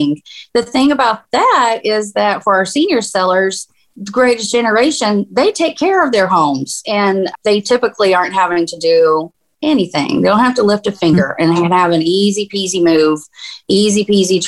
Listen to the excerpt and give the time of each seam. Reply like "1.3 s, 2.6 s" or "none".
none